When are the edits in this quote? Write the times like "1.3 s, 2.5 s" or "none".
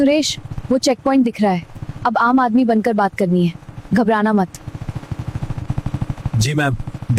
none